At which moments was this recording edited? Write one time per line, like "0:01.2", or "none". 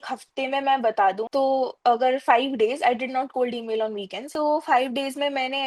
0:01.2
0:04.3